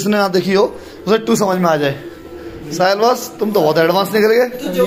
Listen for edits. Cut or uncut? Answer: uncut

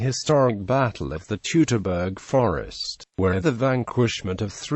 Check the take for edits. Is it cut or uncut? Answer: cut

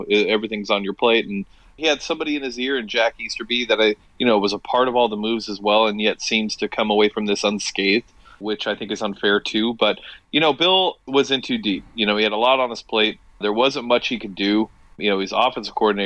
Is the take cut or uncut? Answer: cut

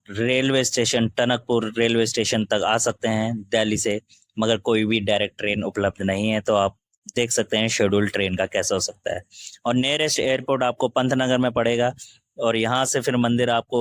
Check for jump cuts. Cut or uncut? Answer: uncut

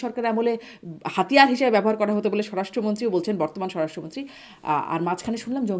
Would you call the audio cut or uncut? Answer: uncut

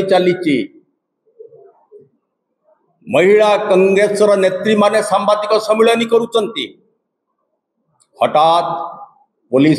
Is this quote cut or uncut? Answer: uncut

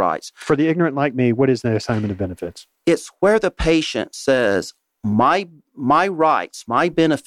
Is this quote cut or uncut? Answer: uncut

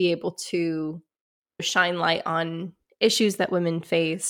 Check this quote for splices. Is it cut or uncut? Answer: cut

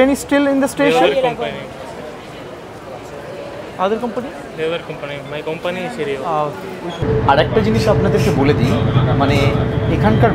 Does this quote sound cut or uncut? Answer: cut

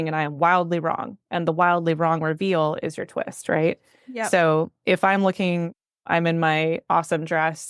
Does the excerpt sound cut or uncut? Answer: uncut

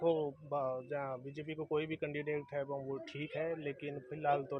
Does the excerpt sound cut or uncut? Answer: uncut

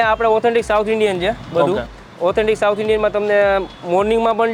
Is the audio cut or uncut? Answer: uncut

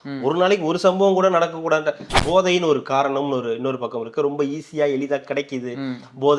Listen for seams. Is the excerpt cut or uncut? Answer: cut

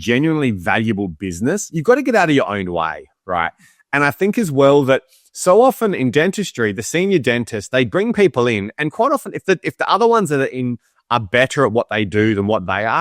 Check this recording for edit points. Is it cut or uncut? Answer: uncut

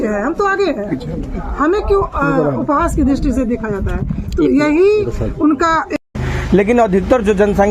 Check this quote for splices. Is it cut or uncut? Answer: cut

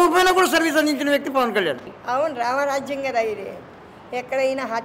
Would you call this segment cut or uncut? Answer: cut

